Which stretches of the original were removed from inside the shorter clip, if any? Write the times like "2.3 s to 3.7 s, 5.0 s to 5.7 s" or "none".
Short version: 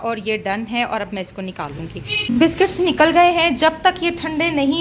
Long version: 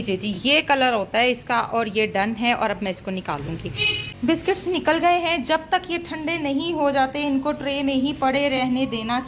3.9 s to 4.0 s